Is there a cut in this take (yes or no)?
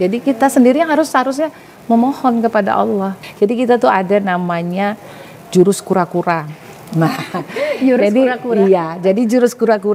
yes